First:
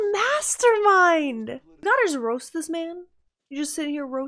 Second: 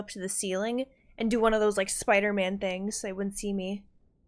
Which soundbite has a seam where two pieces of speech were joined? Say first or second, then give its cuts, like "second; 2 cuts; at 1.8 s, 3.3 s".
first; 1 cut; at 1.8 s